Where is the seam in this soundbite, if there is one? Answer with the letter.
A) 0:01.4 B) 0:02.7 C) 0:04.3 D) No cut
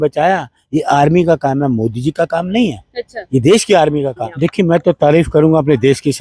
C